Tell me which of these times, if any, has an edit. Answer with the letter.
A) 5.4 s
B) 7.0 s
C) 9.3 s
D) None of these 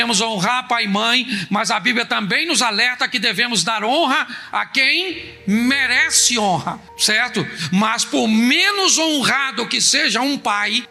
D